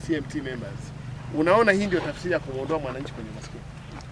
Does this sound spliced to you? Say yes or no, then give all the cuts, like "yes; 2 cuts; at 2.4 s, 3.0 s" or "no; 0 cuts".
no; 0 cuts